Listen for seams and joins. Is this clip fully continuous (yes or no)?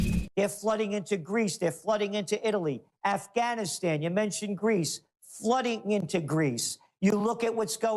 no